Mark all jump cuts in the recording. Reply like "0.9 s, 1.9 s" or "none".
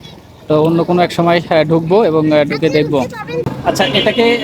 3.5 s